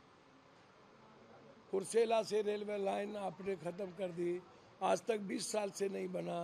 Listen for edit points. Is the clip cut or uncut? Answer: uncut